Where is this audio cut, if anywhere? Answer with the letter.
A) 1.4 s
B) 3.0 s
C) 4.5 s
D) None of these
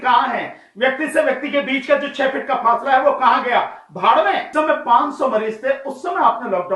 C